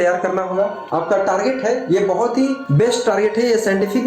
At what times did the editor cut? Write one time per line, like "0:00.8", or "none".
0:00.8
0:02.6